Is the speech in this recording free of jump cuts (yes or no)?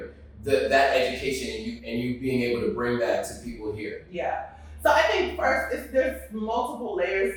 yes